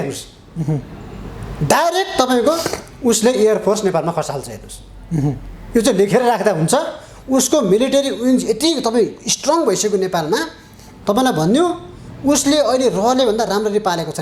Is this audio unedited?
yes; 0 cuts

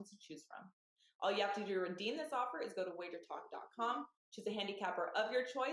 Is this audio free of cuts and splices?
yes; 0 cuts

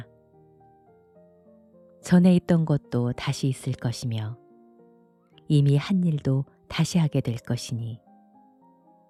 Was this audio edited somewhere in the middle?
no; 0 cuts

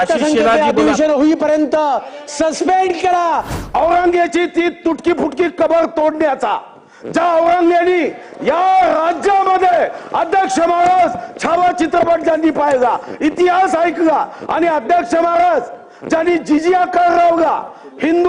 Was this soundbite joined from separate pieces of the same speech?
yes; 1 cut; at 3.5 s

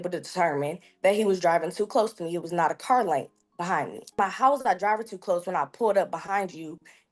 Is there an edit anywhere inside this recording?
yes; 1 cut; at 4.2 s

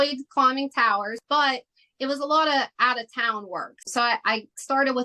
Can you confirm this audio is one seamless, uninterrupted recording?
no; 2 cuts; at 1.2 s, 3.9 s

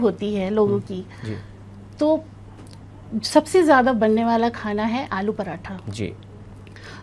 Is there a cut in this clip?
no; 0 cuts

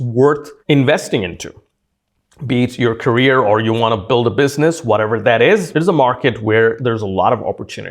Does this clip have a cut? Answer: yes; 2 cuts; at 5.7 s, 6.8 s

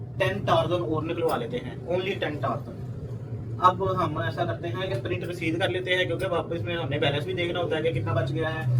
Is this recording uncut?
yes; 0 cuts

